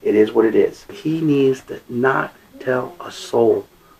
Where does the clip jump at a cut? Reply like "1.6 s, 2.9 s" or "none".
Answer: 0.9 s